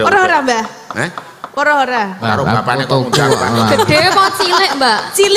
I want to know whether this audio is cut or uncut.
uncut